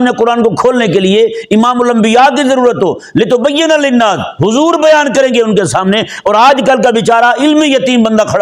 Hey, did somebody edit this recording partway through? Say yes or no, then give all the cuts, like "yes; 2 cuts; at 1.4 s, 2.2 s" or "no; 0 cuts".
no; 0 cuts